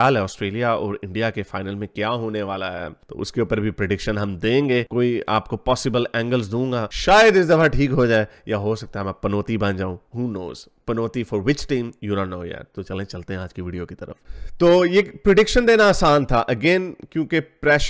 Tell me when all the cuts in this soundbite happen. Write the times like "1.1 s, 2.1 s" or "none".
none